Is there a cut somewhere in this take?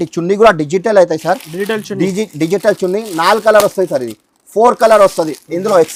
no; 0 cuts

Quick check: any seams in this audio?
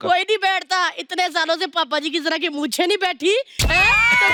no; 0 cuts

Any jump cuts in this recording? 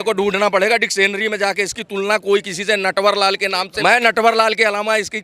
yes; 1 cut; at 3.7 s

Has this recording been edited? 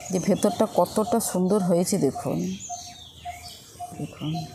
no; 0 cuts

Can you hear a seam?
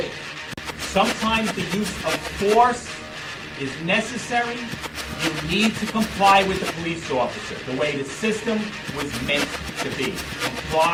no; 0 cuts

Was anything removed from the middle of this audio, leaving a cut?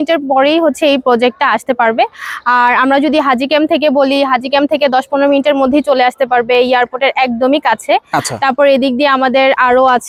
no; 0 cuts

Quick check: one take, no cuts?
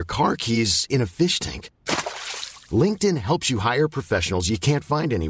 yes; 0 cuts

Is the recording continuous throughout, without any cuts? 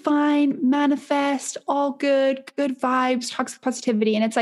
yes; 0 cuts

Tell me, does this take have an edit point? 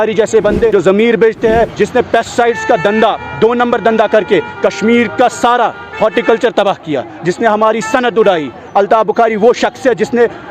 yes; 2 cuts; at 0.7 s, 1.7 s

